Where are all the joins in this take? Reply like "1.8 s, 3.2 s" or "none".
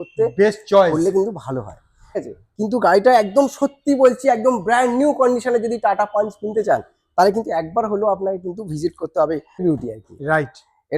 2.2 s, 9.6 s